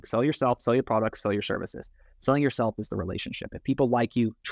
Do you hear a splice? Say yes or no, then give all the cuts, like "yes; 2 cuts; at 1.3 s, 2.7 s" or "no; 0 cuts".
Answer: no; 0 cuts